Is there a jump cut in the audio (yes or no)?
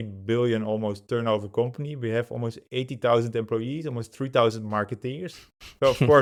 no